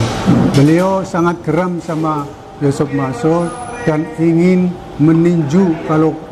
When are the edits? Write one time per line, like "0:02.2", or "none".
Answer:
none